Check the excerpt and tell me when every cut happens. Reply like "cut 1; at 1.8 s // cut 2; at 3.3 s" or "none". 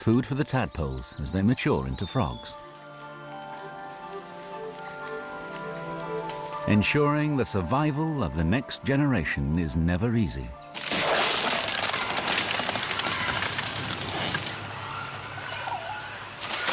none